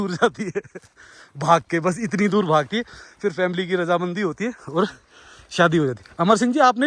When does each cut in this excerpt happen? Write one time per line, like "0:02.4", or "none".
none